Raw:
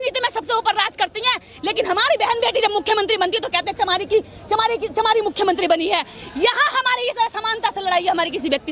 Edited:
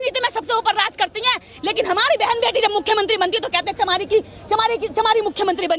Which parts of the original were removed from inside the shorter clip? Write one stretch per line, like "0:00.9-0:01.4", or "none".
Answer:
none

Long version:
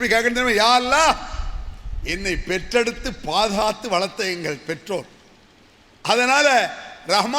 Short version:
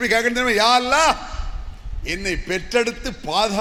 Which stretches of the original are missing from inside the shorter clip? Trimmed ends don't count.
none

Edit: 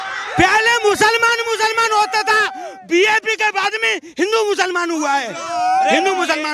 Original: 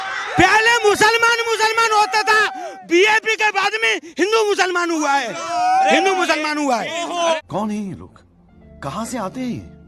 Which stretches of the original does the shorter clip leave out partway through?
none

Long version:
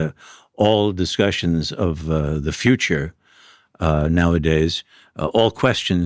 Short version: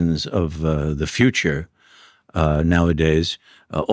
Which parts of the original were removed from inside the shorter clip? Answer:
none

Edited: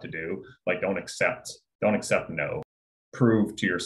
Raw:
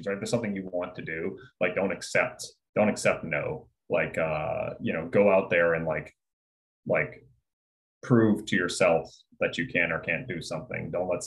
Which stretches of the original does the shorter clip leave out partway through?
0:03.7-0:07.6

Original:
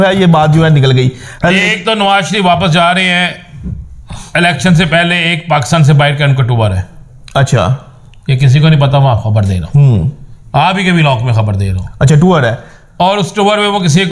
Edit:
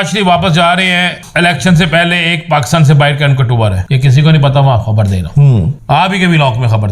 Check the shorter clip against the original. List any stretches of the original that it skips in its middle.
0:03.4-0:04.2
0:06.8-0:08.2
0:10.1-0:10.4

